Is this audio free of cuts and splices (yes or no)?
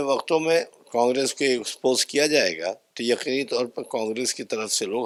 yes